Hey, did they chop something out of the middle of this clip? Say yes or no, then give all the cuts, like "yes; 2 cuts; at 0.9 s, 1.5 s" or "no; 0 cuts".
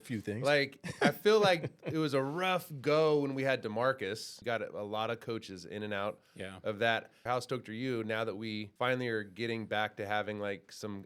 yes; 3 cuts; at 4.3 s, 7.2 s, 8.7 s